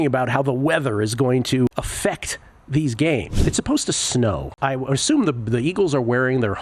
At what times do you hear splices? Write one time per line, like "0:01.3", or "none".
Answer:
0:01.7
0:03.4
0:04.5